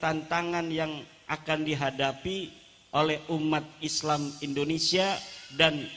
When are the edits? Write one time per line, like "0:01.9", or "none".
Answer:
none